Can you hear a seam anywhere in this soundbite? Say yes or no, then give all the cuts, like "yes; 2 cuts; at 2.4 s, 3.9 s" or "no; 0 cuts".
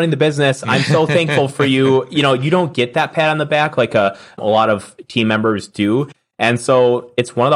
no; 0 cuts